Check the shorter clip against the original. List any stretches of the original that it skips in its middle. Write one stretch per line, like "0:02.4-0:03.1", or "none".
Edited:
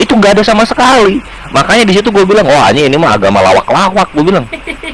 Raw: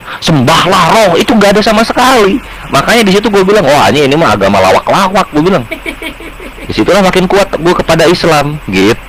none